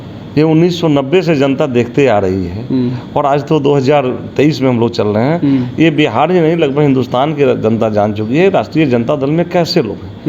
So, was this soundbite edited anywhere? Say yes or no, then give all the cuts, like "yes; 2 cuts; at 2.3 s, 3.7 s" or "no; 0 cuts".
no; 0 cuts